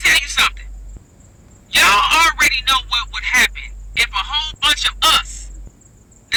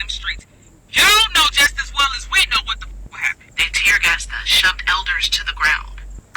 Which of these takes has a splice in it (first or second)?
second